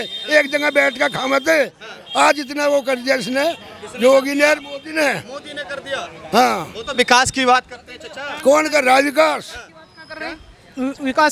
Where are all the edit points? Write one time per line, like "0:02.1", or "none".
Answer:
none